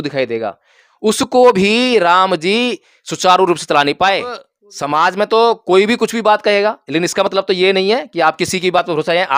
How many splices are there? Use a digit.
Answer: 1